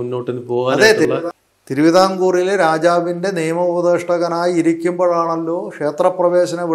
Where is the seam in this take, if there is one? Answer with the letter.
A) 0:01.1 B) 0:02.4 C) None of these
A